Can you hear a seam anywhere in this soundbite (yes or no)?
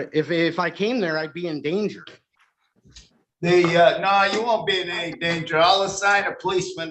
no